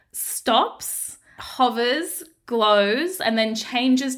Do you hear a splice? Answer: no; 0 cuts

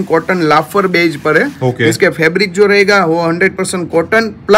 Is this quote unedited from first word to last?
yes; 0 cuts

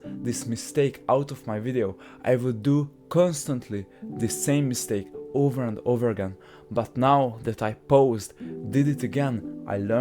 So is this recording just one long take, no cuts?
yes; 0 cuts

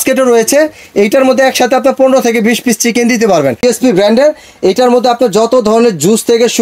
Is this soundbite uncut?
no; 1 cut; at 3.6 s

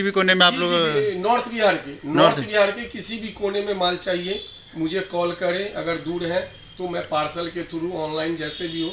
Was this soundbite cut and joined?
no; 0 cuts

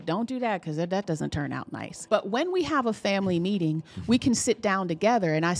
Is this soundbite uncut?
no; 1 cut; at 1.9 s

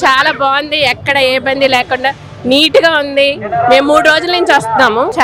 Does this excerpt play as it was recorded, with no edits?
yes; 0 cuts

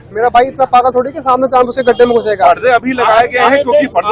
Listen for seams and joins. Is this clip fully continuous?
yes; 0 cuts

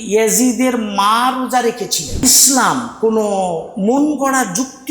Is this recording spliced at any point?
yes; 1 cut; at 2.2 s

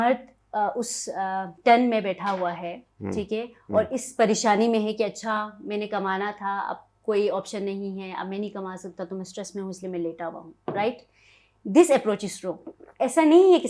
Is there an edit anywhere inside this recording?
no; 0 cuts

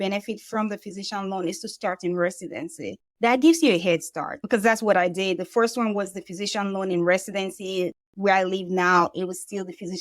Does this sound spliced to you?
yes; 1 cut; at 4.4 s

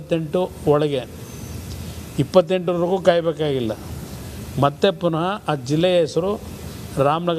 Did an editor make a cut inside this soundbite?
no; 0 cuts

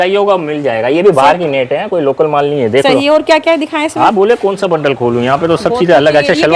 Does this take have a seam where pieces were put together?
no; 0 cuts

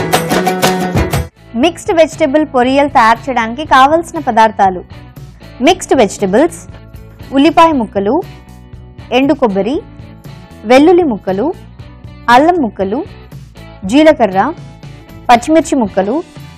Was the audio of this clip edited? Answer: yes; 1 cut; at 1.2 s

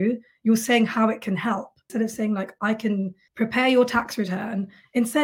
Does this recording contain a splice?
yes; 2 cuts; at 1.9 s, 3.2 s

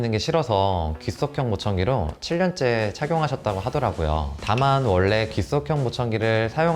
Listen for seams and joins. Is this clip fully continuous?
no; 1 cut; at 4.3 s

